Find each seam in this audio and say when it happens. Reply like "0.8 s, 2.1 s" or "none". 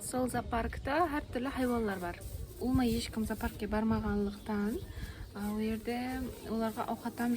2.6 s